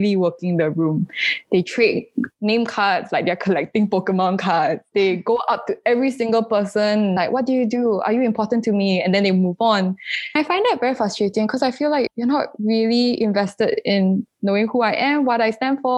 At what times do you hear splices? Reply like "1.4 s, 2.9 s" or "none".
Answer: 7.2 s, 10.3 s, 12.1 s

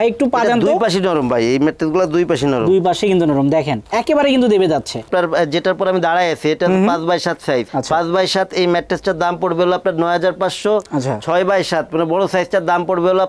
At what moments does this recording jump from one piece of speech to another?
none

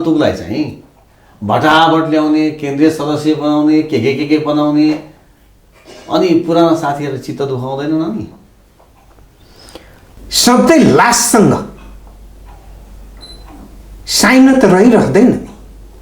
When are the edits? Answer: 10.1 s

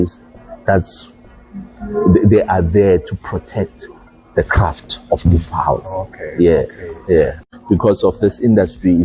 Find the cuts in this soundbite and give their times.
7.5 s

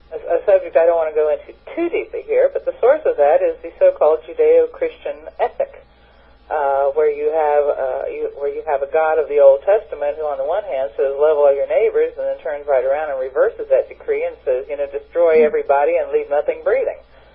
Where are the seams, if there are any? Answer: none

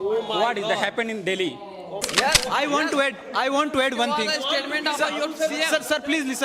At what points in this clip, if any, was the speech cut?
2.1 s

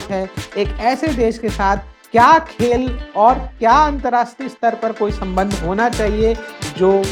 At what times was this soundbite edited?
none

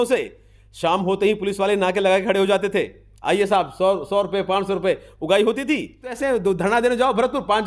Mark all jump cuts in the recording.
6.2 s

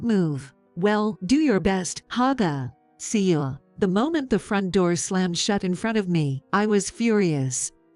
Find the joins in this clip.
3.6 s

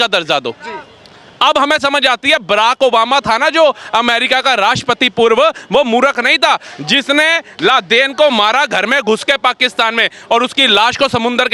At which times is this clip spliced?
none

